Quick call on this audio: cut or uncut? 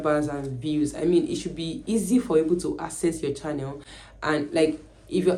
uncut